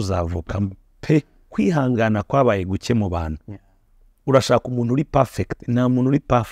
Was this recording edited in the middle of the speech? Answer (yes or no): yes